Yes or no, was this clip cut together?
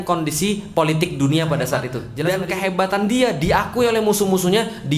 yes